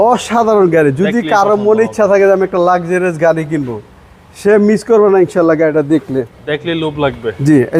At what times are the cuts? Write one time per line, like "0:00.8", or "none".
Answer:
none